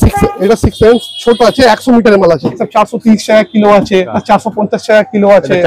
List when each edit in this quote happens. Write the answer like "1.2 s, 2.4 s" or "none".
2.6 s, 4.1 s

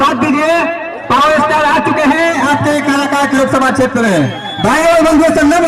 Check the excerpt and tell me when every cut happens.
none

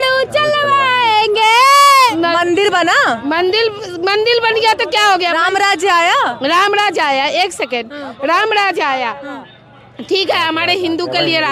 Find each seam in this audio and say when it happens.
2.1 s

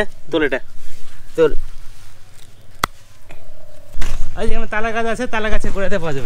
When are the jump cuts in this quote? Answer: 3.8 s

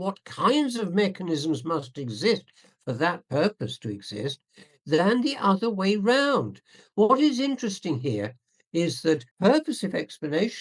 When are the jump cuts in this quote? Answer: 9.3 s

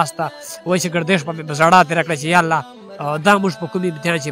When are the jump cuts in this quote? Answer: none

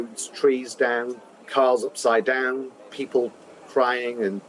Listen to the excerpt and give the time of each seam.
1.4 s, 2.9 s

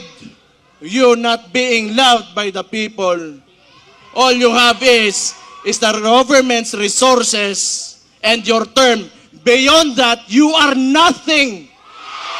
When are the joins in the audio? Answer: none

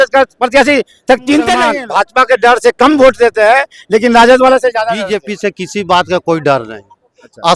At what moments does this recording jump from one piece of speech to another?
1.7 s, 5.1 s

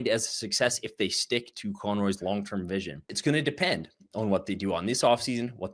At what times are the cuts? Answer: 3.1 s

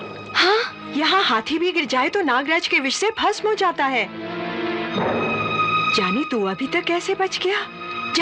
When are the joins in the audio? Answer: none

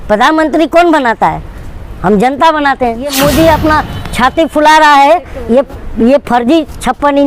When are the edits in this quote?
3.1 s

